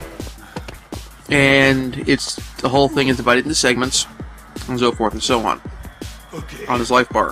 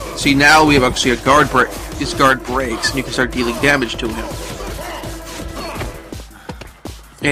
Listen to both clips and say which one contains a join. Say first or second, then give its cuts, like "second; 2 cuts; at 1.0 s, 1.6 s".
first; 1 cut; at 5.5 s